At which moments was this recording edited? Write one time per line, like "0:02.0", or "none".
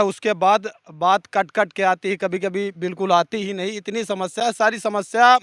none